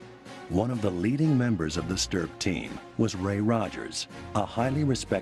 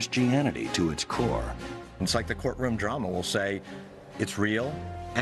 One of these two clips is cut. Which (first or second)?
first